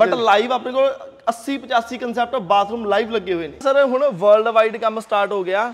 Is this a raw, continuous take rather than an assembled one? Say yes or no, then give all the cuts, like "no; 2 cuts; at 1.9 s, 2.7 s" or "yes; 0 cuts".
no; 1 cut; at 3.6 s